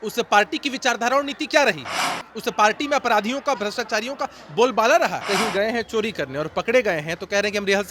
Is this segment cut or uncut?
cut